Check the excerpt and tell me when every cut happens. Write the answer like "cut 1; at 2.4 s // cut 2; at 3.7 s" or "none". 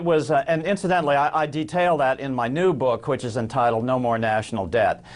cut 1; at 3.4 s